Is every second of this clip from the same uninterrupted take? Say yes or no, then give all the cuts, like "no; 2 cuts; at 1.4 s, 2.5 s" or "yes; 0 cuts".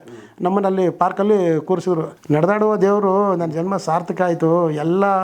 no; 1 cut; at 2.1 s